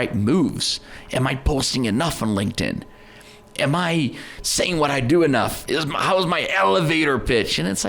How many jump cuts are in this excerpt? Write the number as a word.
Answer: one